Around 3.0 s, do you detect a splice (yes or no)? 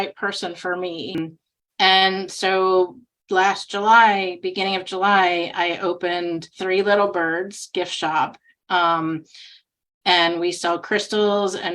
no